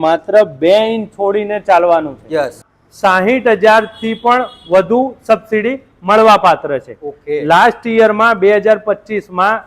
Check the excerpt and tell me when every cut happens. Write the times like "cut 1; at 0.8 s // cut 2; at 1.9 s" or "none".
cut 1; at 2.7 s